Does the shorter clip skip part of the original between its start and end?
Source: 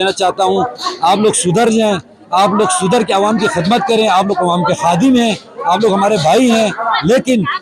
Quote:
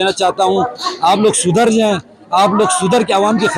no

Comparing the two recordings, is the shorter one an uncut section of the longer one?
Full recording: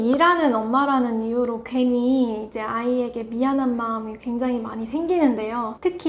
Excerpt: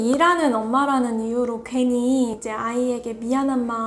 no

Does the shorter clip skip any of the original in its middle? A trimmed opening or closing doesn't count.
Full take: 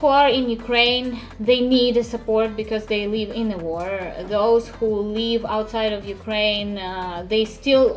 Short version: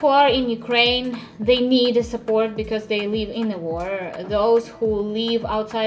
no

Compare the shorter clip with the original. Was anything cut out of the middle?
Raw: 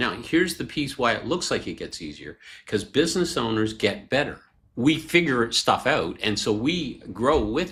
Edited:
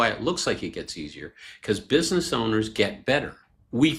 no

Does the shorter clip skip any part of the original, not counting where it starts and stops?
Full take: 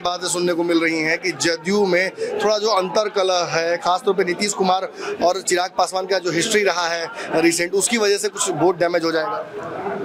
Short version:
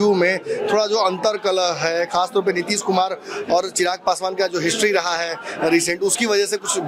no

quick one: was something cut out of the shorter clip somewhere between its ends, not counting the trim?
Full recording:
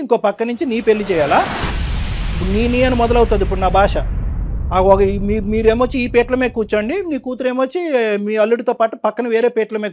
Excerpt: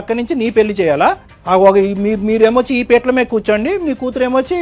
yes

